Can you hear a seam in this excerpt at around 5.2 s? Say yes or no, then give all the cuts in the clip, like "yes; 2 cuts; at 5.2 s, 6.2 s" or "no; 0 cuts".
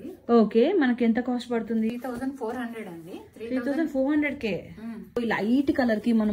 yes; 2 cuts; at 1.9 s, 5.2 s